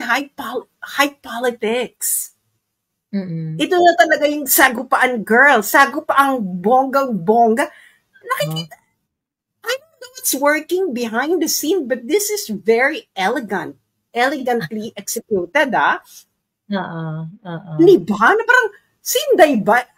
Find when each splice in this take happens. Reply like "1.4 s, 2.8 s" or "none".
none